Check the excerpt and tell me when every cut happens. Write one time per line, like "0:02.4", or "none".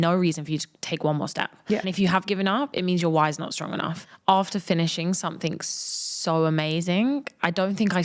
0:01.9
0:04.1